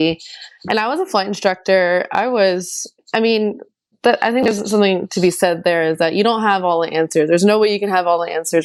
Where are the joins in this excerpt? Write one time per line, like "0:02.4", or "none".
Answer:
none

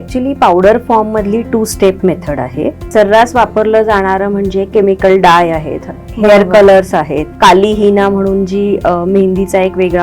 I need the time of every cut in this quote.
0:02.9
0:07.3

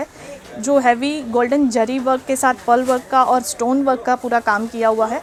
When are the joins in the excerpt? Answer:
none

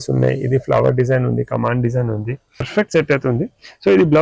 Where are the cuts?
0:02.7

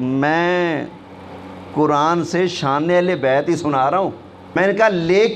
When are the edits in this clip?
0:04.4

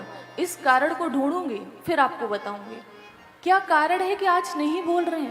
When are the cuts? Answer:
none

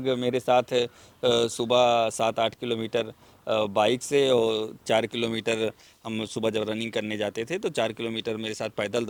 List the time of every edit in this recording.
none

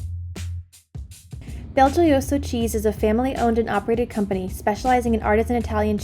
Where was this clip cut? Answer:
0:01.3

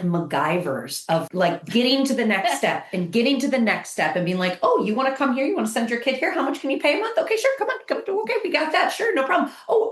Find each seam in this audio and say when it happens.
0:01.3

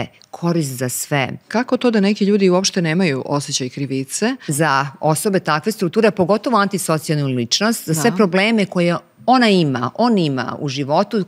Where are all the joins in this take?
0:01.4
0:04.5

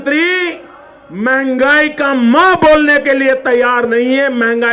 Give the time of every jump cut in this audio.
none

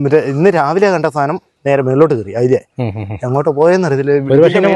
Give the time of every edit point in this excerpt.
none

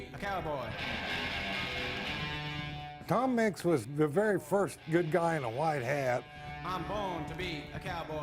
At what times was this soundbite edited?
0:02.9
0:03.9
0:06.4

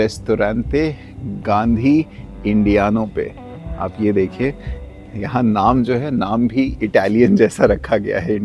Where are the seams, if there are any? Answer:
none

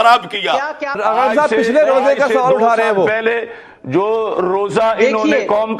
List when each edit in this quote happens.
0:01.0

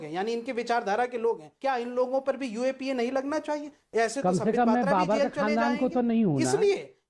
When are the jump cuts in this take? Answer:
0:01.5

